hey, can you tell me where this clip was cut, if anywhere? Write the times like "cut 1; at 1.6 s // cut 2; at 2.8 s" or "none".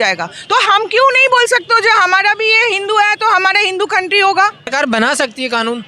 cut 1; at 4.6 s